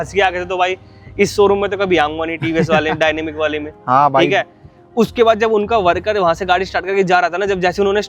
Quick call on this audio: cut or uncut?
uncut